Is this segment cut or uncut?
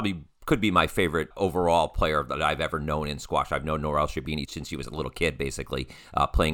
cut